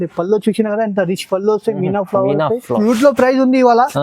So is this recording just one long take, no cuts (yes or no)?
no